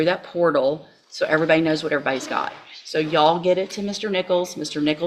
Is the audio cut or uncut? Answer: uncut